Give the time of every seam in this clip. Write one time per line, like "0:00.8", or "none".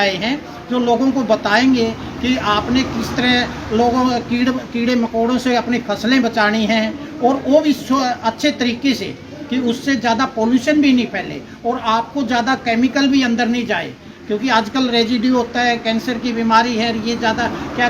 none